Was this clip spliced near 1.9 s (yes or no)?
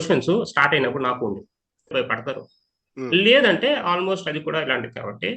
yes